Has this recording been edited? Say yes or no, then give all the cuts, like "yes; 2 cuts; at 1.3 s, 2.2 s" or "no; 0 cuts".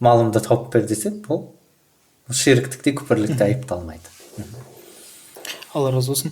no; 0 cuts